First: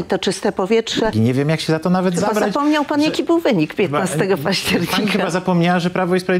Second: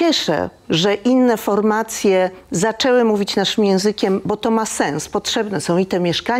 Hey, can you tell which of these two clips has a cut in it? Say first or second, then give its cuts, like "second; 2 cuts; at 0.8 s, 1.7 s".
first; 1 cut; at 1.1 s